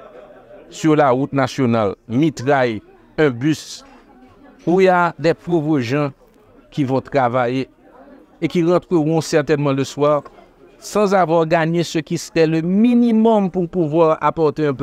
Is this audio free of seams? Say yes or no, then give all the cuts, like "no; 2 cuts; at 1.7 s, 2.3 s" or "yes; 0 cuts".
yes; 0 cuts